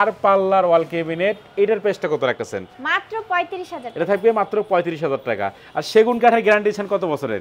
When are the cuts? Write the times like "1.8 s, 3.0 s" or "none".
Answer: none